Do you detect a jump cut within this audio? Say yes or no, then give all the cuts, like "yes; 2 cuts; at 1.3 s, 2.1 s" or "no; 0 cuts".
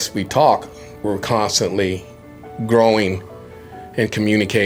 no; 0 cuts